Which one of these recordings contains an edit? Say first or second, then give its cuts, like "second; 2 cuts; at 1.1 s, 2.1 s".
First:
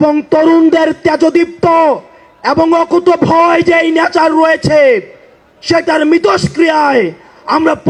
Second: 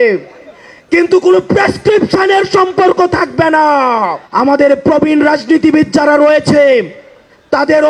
second; 1 cut; at 4.2 s